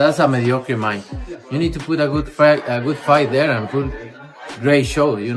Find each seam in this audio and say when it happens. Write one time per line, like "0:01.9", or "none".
0:04.4